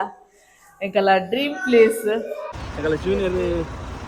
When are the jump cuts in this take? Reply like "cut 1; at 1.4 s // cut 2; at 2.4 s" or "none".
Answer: cut 1; at 2.5 s